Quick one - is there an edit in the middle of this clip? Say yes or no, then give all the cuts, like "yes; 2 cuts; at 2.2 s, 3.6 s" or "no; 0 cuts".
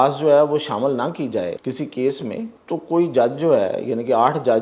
yes; 2 cuts; at 1.6 s, 2.6 s